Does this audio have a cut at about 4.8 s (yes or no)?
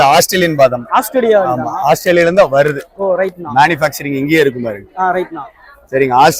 no